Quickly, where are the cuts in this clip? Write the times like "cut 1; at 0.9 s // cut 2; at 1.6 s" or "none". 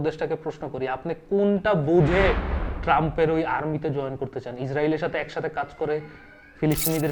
none